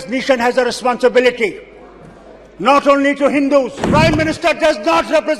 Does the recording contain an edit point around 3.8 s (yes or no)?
yes